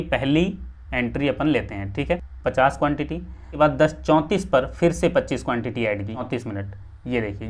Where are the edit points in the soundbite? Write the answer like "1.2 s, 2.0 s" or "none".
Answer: 2.3 s, 3.4 s, 6.2 s